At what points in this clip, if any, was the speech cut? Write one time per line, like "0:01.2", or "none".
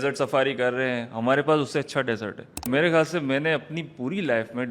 0:02.7

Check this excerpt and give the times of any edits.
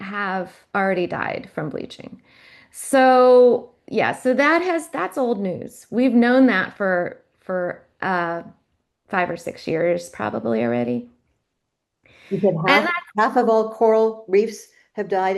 none

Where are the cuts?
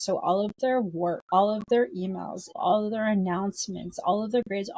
0:01.2
0:02.4

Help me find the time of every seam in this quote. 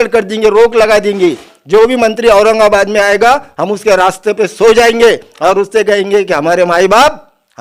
none

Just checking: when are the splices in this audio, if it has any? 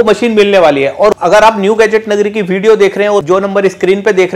0:01.2
0:03.2

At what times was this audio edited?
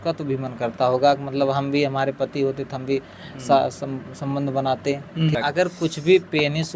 0:05.3

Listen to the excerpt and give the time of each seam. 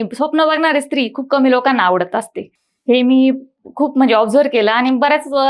none

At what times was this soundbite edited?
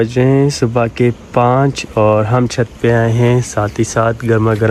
none

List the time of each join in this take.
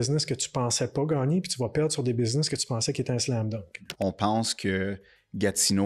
0:03.9

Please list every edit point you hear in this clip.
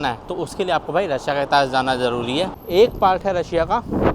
0:02.6

